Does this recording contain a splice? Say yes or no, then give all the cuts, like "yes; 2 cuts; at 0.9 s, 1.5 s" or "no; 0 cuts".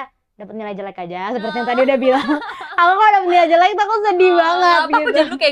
no; 0 cuts